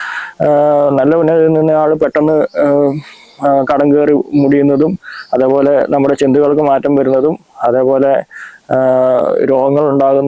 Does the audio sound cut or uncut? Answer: uncut